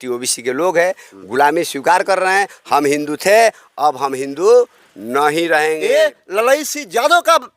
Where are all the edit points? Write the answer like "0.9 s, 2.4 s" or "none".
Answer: 5.8 s